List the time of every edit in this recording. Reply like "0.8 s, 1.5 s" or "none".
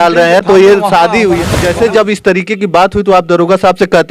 1.6 s